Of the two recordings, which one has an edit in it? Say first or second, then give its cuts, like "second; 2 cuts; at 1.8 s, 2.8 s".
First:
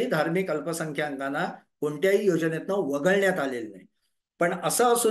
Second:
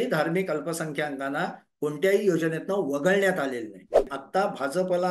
second; 1 cut; at 4.2 s